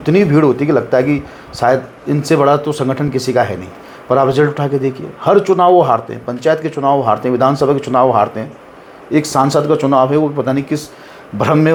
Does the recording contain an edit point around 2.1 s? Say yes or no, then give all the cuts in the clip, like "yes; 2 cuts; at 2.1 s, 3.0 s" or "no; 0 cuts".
no; 0 cuts